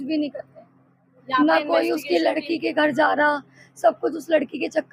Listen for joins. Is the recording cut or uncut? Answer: uncut